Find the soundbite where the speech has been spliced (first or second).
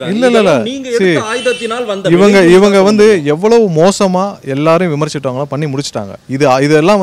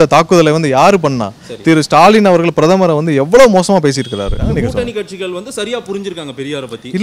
second